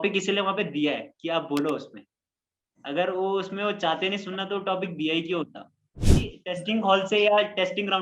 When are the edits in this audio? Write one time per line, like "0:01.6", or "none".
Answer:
0:06.0